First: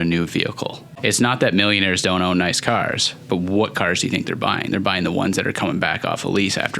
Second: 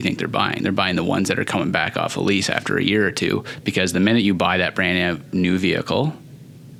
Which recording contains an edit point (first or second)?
first